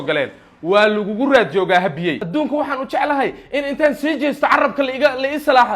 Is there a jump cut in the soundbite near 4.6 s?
no; 1 cut; at 2.2 s

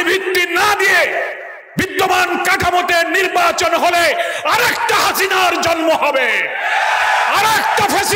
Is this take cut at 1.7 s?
no; 0 cuts

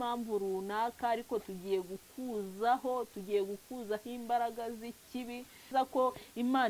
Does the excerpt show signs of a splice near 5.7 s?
yes; 1 cut; at 5.7 s

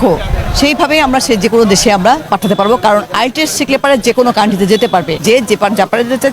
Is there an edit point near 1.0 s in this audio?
no; 2 cuts; at 2.2 s, 5.1 s

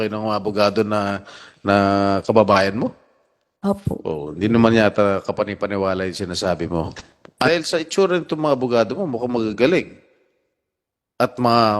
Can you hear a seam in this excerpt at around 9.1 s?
no; 1 cut; at 7.5 s

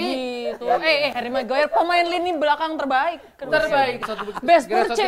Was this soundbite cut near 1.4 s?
no; 1 cut; at 4.1 s

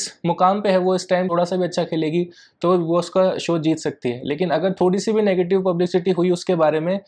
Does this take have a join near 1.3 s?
yes; 1 cut; at 1.3 s

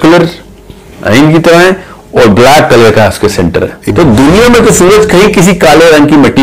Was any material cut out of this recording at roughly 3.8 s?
yes; 1 cut; at 3.8 s

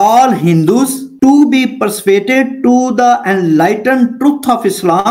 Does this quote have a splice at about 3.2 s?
no; 1 cut; at 1.0 s

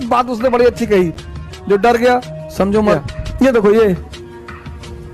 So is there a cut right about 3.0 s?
yes; 1 cut; at 3.0 s

